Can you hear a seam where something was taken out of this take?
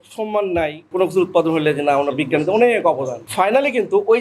yes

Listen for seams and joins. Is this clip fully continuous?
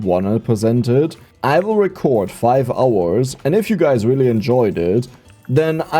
no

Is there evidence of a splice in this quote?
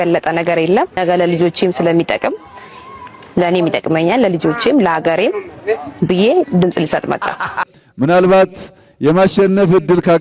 yes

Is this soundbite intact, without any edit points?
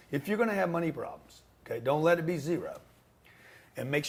yes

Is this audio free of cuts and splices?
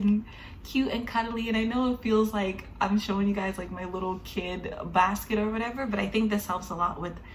yes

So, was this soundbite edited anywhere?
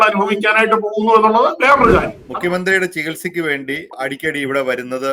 yes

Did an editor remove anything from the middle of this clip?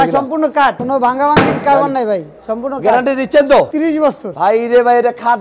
yes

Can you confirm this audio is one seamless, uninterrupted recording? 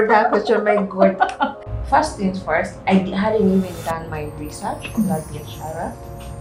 no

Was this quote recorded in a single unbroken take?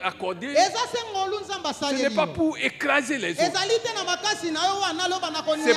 yes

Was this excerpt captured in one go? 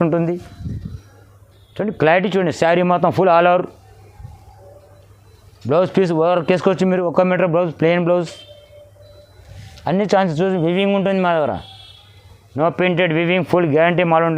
yes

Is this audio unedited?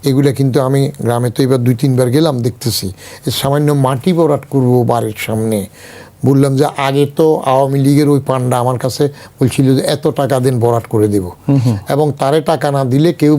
yes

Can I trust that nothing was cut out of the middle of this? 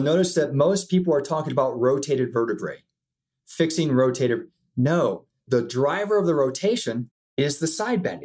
no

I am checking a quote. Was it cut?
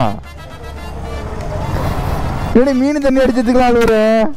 no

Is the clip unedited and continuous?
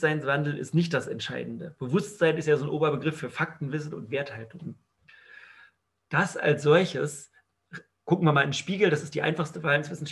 yes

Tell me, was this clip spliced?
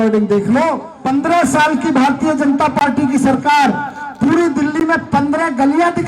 yes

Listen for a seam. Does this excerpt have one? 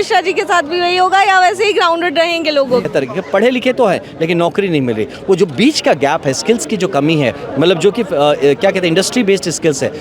yes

